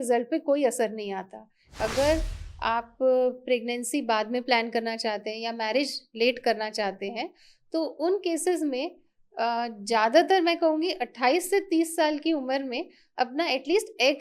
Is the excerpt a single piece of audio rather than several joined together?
no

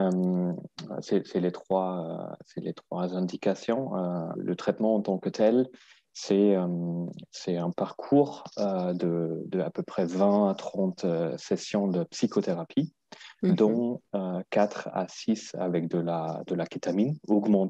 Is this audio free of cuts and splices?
no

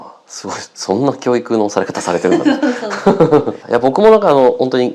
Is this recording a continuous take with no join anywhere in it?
no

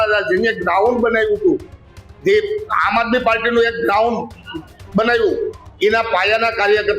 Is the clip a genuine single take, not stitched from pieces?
yes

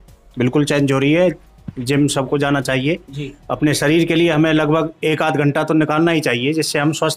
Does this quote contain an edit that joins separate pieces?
no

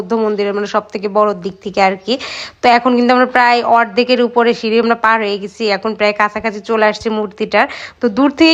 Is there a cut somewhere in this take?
no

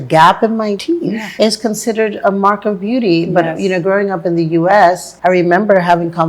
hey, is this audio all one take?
no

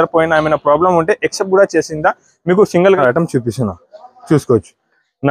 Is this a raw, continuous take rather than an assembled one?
yes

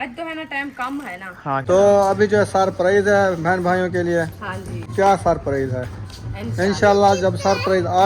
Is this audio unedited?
no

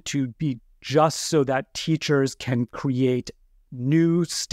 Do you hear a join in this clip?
no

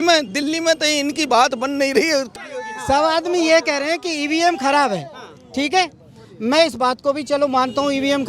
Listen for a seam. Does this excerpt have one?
yes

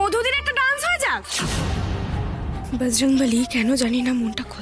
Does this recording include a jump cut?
yes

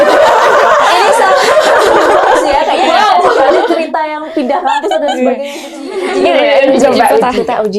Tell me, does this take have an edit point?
yes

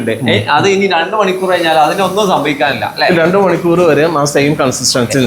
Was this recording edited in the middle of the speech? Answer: no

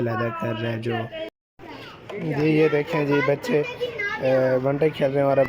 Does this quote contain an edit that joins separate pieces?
yes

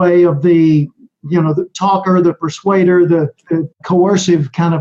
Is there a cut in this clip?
yes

